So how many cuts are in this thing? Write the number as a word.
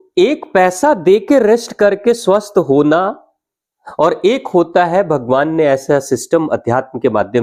zero